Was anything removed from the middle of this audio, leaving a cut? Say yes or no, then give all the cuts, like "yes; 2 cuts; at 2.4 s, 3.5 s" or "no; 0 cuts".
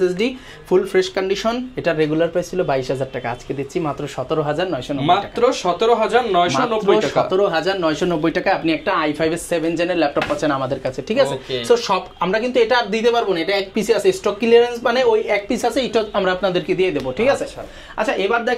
no; 0 cuts